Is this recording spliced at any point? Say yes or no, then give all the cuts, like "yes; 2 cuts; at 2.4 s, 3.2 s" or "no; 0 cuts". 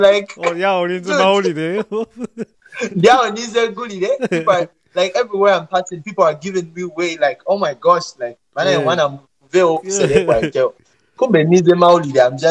no; 0 cuts